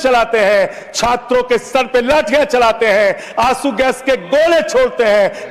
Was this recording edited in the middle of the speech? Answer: no; 0 cuts

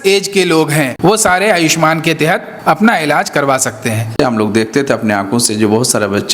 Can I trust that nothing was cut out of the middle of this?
no; 3 cuts; at 0.9 s, 2.5 s, 4.2 s

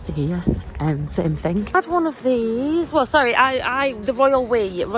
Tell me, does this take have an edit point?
yes; 1 cut; at 1.7 s

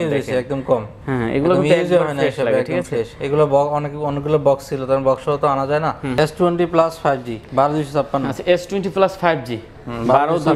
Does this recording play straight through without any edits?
no; 1 cut; at 6.1 s

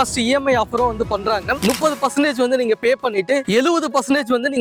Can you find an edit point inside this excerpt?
no; 0 cuts

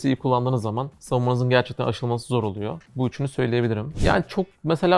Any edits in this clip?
yes; 3 cuts; at 0.9 s, 2.8 s, 3.9 s

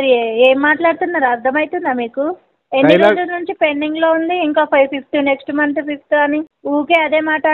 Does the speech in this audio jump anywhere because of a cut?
yes; 1 cut; at 6.5 s

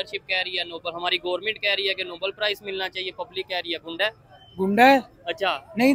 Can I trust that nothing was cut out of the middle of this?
yes; 0 cuts

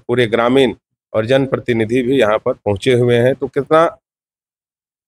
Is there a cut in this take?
no; 0 cuts

